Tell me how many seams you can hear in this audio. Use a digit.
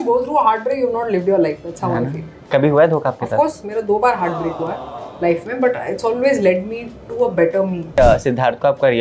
1